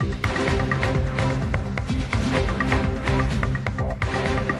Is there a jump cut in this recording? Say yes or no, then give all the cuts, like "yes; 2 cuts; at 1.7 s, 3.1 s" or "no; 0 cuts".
yes; 2 cuts; at 1.0 s, 2.3 s